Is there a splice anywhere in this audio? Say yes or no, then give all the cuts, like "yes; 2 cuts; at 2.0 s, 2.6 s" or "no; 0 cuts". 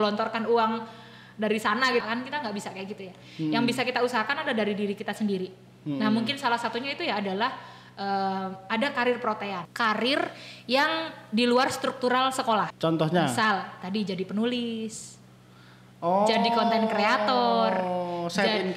yes; 3 cuts; at 2.0 s, 9.6 s, 12.7 s